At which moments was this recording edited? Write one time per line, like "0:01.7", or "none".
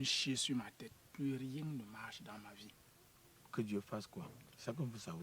0:03.5